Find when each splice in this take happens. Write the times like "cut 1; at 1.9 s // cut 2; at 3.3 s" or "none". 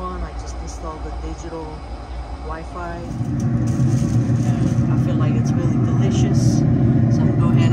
cut 1; at 3.2 s